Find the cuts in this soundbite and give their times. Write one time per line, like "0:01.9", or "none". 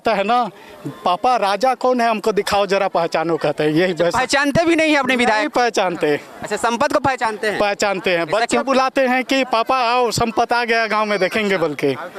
none